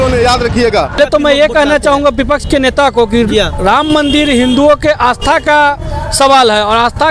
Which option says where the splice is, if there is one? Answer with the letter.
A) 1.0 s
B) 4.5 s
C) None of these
A